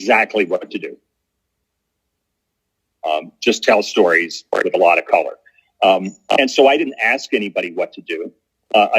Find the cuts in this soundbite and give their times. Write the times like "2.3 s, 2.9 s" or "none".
none